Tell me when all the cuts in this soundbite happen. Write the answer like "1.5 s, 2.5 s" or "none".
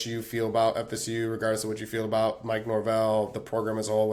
none